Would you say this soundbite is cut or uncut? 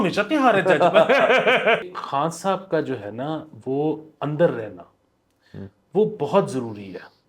cut